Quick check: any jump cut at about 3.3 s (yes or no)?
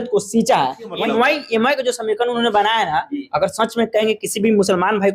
no